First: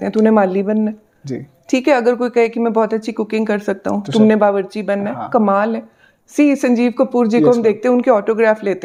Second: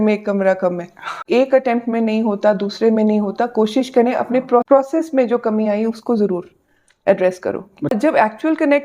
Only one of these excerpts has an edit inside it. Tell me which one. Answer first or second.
second